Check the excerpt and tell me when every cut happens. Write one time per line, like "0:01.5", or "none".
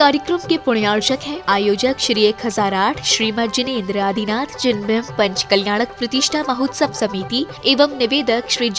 0:01.0